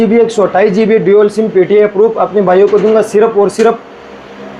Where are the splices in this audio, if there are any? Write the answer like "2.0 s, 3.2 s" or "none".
none